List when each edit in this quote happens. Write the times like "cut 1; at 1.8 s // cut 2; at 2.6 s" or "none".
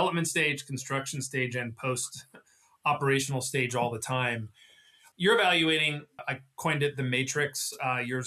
cut 1; at 5.0 s // cut 2; at 6.2 s